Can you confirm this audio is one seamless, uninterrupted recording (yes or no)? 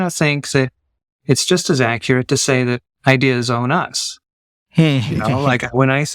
yes